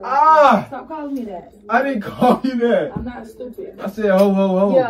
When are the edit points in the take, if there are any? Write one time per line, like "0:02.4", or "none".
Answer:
none